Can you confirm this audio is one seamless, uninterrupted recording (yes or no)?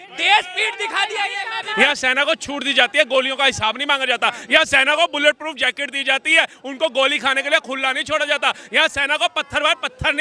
no